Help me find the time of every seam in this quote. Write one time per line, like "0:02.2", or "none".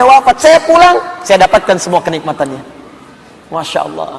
none